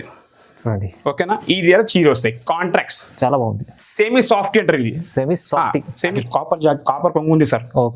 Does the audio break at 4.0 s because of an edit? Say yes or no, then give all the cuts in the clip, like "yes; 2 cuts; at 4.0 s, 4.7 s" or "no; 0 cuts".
no; 1 cut; at 6.1 s